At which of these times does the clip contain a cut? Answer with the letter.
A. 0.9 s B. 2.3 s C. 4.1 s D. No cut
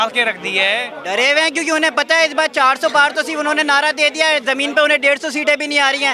A